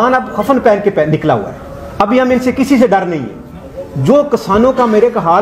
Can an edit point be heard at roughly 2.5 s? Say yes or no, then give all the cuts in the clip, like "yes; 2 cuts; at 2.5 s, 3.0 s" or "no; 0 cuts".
no; 0 cuts